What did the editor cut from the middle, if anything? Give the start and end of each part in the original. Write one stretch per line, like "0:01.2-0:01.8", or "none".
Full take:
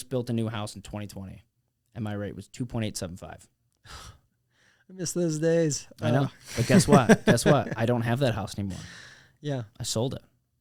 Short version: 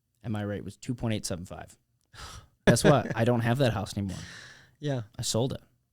0:04.3-0:07.2